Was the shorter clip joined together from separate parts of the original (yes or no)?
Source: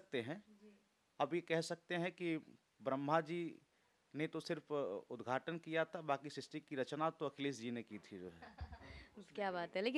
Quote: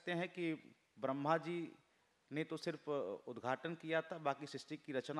no